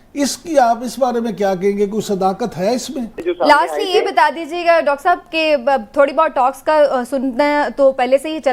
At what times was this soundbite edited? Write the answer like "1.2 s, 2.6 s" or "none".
3.2 s